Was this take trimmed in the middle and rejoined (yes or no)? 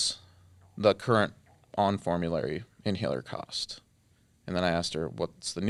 no